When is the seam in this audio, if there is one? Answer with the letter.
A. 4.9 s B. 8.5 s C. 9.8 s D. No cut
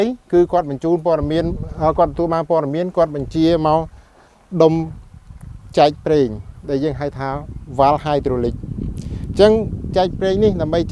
D